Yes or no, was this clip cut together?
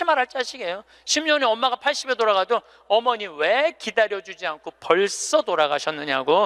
no